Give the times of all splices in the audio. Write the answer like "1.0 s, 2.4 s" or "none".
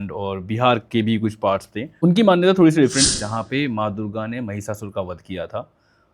2.0 s, 3.1 s